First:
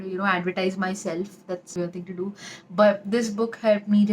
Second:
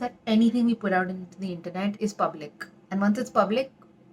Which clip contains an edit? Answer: first; 1 cut; at 1.7 s

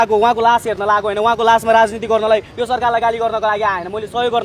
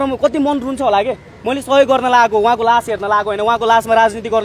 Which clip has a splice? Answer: second; 1 cut; at 1.3 s

